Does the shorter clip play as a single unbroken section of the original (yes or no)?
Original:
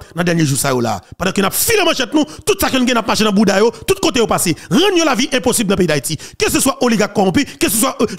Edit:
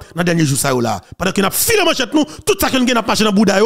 yes